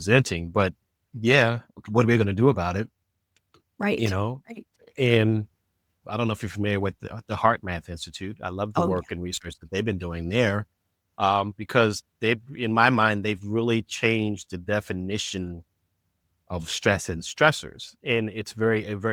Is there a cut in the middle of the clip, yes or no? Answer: no